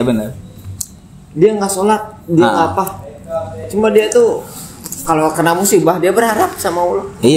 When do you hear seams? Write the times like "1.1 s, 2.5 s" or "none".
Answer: none